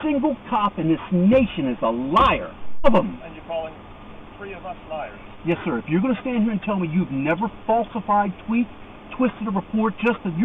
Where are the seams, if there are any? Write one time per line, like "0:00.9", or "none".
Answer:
0:02.8

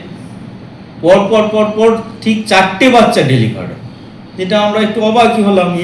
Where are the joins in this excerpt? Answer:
none

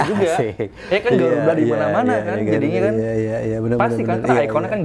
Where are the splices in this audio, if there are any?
none

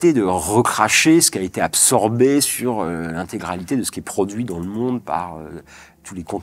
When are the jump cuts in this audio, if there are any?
none

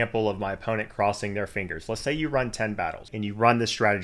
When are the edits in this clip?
0:03.1

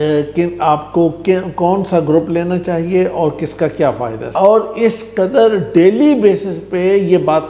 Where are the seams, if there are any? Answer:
0:04.2

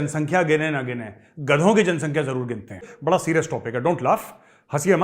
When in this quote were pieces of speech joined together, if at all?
0:02.9

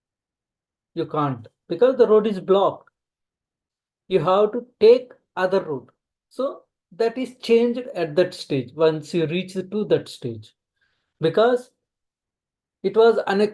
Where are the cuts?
none

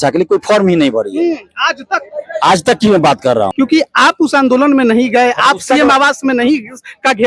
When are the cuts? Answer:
0:03.5

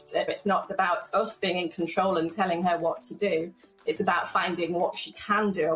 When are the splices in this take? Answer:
none

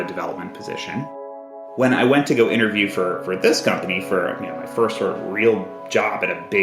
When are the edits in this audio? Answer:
0:01.5

